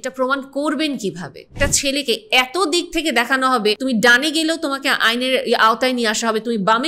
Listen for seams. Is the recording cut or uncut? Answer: cut